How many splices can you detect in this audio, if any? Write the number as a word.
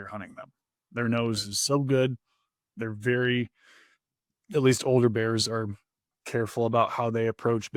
zero